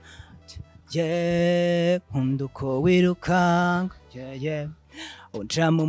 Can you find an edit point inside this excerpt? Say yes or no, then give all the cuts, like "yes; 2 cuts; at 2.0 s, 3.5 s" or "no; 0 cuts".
no; 0 cuts